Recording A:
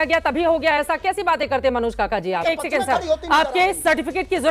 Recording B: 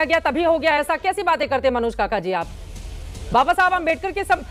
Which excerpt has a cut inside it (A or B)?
A